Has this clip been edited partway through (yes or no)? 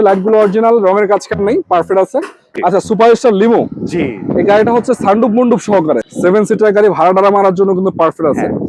yes